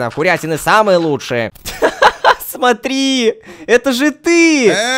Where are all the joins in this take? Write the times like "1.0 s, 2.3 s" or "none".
1.6 s